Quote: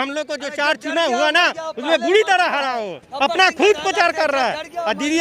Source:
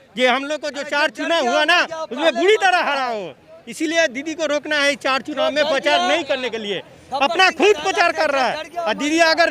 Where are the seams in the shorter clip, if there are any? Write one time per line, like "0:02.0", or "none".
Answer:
0:03.0